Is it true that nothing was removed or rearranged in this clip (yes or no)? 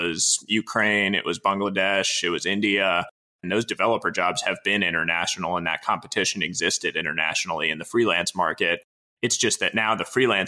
no